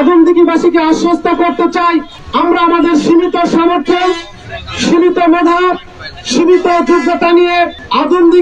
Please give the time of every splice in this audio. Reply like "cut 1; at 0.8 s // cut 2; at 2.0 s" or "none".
cut 1; at 2.2 s